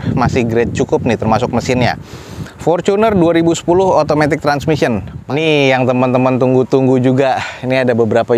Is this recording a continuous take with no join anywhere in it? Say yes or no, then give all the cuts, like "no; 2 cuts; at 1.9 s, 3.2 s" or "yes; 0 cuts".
no; 1 cut; at 5.1 s